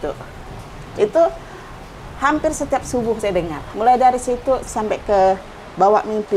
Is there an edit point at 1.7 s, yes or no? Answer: no